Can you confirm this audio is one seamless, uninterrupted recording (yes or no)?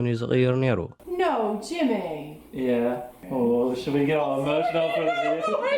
no